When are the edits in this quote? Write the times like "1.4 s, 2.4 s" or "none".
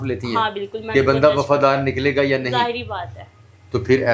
none